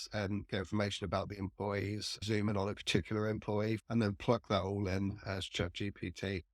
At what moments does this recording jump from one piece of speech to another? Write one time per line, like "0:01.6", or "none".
0:02.2
0:03.8